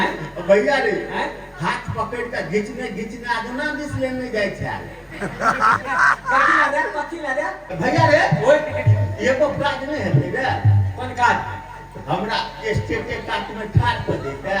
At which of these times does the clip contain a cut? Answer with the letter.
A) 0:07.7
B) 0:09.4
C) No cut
A